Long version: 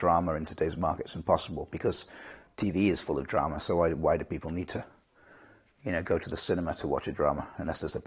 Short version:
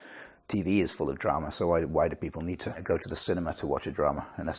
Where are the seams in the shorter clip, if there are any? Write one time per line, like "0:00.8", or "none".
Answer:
0:02.8